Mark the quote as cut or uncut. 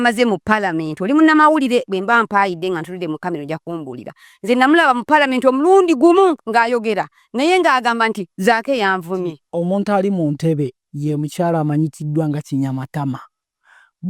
cut